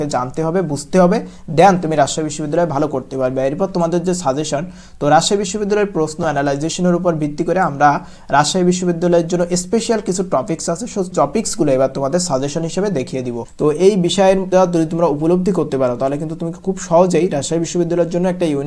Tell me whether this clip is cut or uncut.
cut